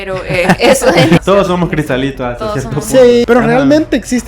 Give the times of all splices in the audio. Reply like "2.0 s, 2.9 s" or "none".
1.2 s, 3.2 s